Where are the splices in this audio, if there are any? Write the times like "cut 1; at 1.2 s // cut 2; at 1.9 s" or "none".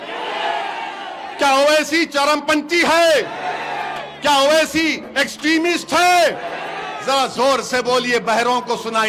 none